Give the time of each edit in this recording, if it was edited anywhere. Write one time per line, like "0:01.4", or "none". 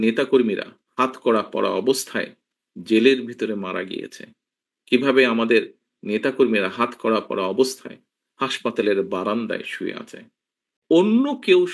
0:10.8